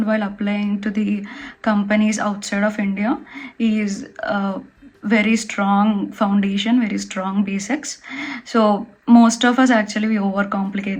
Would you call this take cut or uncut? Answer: uncut